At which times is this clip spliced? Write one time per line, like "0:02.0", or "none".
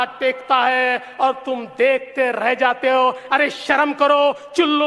none